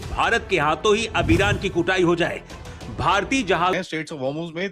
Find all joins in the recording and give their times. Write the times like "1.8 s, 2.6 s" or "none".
3.8 s